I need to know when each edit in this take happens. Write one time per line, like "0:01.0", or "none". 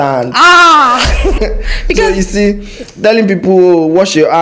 0:01.4